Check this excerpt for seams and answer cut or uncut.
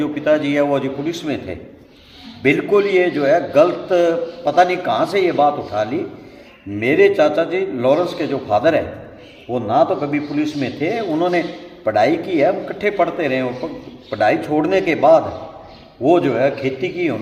uncut